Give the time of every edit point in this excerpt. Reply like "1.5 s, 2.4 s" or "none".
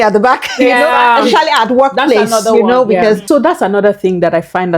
3.2 s